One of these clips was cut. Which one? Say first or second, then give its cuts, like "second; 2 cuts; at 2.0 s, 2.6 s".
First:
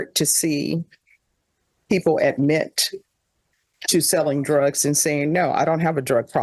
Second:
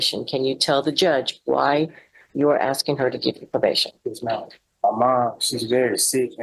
second; 1 cut; at 4.6 s